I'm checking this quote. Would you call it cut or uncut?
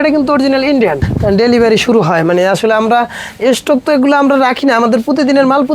cut